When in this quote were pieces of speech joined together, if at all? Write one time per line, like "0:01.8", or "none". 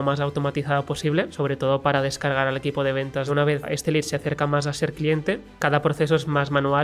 0:01.3
0:03.6
0:05.5